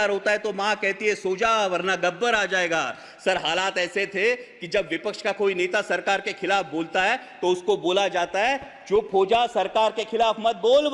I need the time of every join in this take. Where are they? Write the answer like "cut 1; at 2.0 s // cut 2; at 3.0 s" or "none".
none

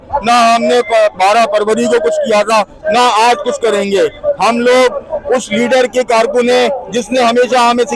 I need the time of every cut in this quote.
none

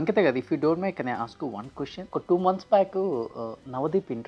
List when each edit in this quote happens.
cut 1; at 2.0 s

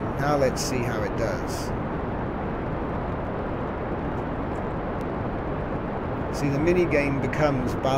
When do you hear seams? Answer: cut 1; at 5.0 s

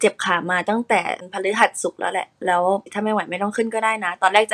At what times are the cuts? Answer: cut 1; at 1.2 s // cut 2; at 2.9 s

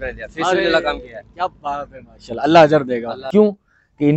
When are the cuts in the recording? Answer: cut 1; at 3.2 s

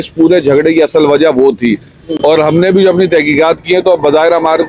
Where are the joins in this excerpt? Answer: none

